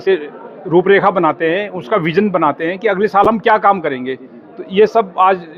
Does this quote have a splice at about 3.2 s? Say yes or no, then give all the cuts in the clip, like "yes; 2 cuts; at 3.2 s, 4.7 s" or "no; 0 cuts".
no; 0 cuts